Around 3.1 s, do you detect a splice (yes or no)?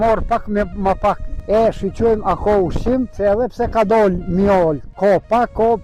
yes